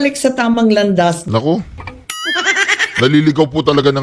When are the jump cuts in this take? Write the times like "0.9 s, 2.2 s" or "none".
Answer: 1.2 s

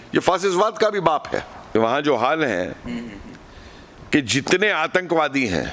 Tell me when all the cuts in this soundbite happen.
1.6 s

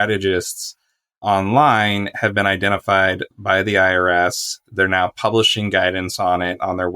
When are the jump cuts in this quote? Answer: 1.2 s

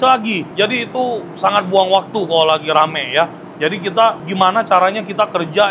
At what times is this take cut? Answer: 4.2 s

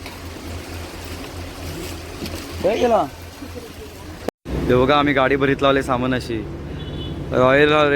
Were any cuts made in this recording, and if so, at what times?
4.3 s

